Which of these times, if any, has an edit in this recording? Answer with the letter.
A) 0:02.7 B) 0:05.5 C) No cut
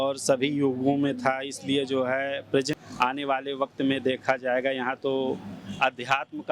A